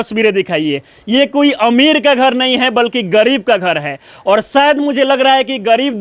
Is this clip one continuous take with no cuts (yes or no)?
yes